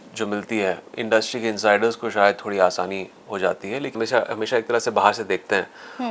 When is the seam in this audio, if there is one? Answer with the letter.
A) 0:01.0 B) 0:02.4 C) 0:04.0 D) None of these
C